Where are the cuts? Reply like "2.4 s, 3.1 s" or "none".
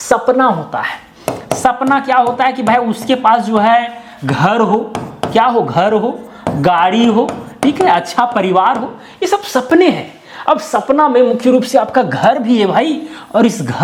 none

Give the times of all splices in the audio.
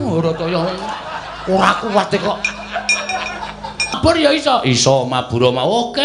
4.0 s

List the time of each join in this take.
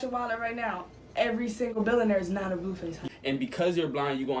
3.0 s

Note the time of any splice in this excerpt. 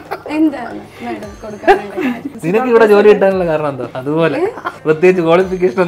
2.3 s, 3.9 s, 4.7 s

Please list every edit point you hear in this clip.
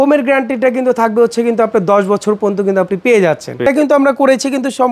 3.7 s

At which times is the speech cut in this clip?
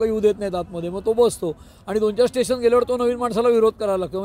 none

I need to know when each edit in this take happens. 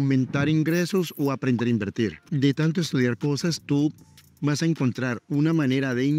2.2 s

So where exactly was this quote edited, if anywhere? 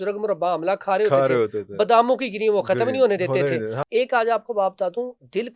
3.8 s

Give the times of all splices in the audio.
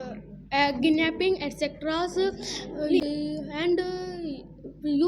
3.0 s

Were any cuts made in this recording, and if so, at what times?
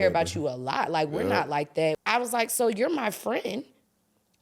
2.0 s

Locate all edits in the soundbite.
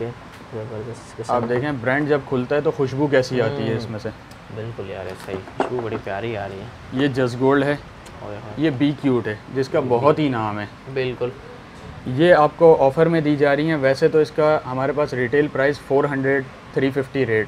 none

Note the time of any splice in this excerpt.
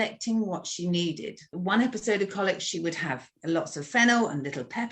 1.6 s, 3.3 s

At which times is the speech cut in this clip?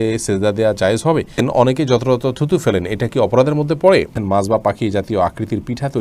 1.4 s, 4.2 s

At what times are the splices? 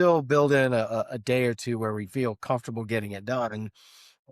none

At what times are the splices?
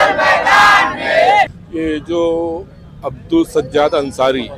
none

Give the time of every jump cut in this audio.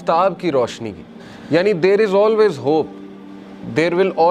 none

